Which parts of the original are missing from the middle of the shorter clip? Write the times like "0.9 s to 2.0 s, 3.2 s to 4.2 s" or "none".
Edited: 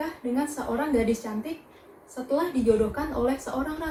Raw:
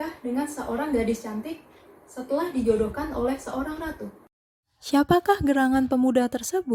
none